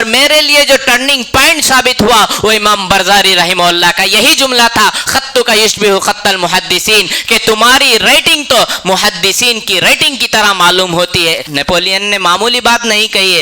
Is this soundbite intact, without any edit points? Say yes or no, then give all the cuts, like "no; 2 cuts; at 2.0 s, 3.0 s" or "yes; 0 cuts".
no; 1 cut; at 11.4 s